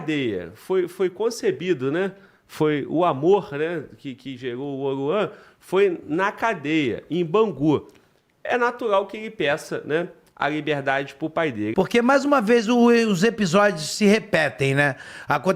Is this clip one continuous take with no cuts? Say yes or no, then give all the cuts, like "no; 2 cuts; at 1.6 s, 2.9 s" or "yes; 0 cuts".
no; 1 cut; at 11.6 s